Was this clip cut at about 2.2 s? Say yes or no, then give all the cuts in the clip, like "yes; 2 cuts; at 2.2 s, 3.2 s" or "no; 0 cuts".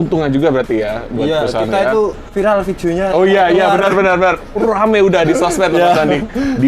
yes; 1 cut; at 2.2 s